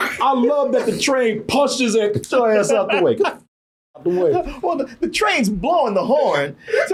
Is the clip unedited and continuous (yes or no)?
yes